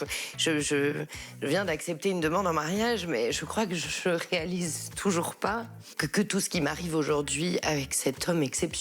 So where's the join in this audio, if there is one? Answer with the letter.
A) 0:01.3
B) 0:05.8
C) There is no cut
B